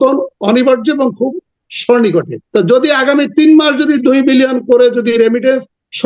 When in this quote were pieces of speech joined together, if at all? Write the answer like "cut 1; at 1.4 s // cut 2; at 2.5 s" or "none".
cut 1; at 2.4 s